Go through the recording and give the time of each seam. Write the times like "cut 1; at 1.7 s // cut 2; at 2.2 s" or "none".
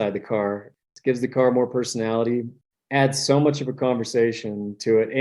cut 1; at 0.9 s // cut 2; at 2.5 s

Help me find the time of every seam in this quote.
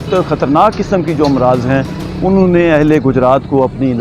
none

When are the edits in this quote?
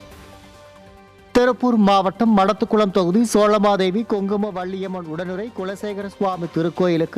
cut 1; at 1.0 s

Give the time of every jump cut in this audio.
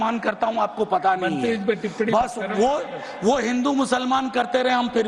none

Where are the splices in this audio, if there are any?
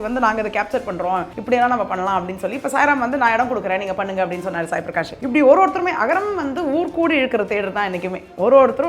cut 1; at 1.3 s // cut 2; at 5.1 s

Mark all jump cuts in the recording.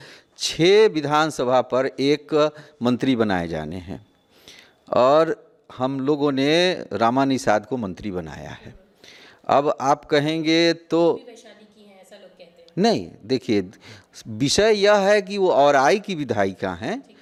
none

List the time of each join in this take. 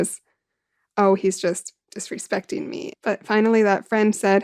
cut 1; at 2.8 s

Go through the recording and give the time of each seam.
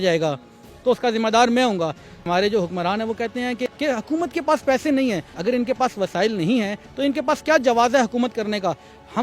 cut 1; at 2.2 s // cut 2; at 3.7 s // cut 3; at 5.3 s

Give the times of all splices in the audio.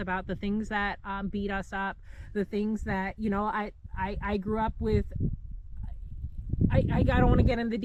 none

